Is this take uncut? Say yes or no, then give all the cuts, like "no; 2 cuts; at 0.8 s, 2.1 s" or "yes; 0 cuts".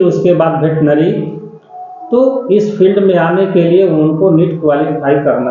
yes; 0 cuts